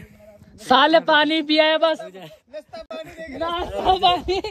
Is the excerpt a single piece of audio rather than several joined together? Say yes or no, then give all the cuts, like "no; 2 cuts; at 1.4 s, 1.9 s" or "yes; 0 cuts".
yes; 0 cuts